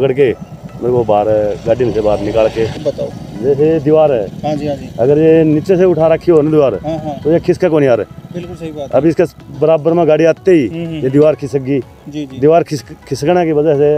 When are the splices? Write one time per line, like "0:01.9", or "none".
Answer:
0:02.8